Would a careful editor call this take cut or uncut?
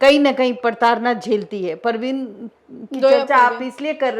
uncut